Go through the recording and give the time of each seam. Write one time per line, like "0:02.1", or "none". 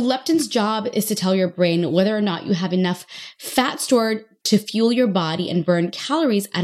none